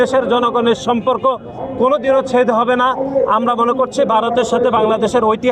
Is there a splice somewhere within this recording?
no; 0 cuts

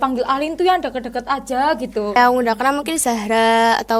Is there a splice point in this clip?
yes; 1 cut; at 2.2 s

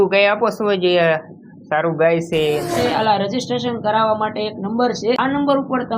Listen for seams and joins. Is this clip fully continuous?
no; 2 cuts; at 2.7 s, 5.2 s

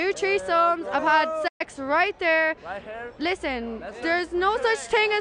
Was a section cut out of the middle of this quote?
no; 0 cuts

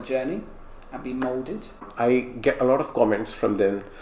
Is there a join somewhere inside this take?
yes; 1 cut; at 1.9 s

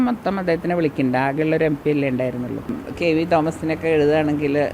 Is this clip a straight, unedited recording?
no; 1 cut; at 2.8 s

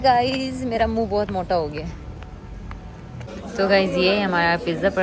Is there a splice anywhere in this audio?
yes; 1 cut; at 3.3 s

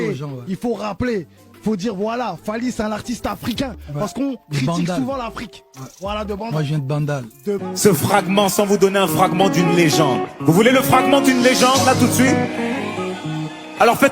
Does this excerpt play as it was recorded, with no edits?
no; 1 cut; at 7.6 s

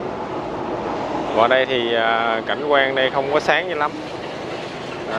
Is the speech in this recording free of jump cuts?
yes; 0 cuts

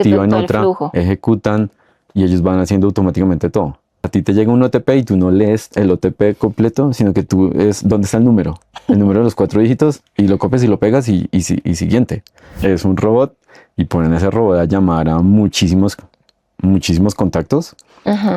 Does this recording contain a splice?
yes; 2 cuts; at 4.1 s, 12.6 s

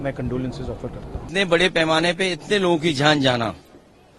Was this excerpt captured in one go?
no; 1 cut; at 1.3 s

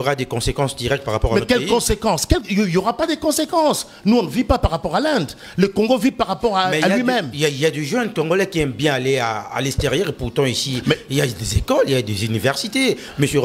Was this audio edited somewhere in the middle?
no; 0 cuts

